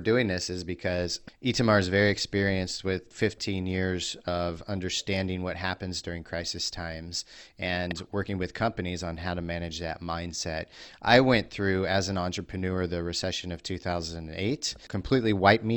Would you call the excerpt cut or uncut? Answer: cut